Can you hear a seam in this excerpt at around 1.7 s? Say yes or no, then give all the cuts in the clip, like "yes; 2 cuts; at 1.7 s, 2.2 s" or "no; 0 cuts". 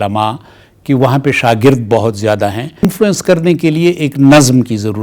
no; 1 cut; at 2.9 s